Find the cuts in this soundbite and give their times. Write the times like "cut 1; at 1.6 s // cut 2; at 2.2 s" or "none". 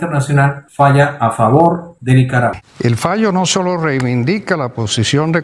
cut 1; at 2.6 s